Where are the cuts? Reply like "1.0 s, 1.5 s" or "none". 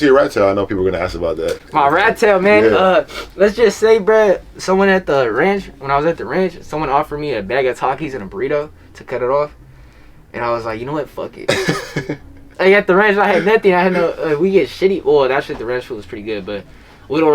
none